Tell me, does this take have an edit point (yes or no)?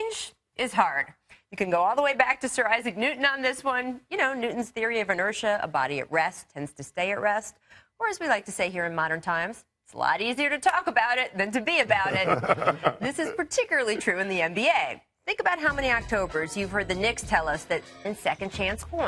no